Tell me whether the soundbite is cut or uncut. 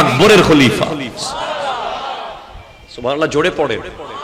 uncut